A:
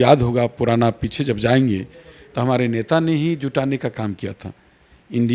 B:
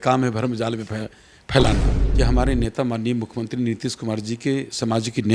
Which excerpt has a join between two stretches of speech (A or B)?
B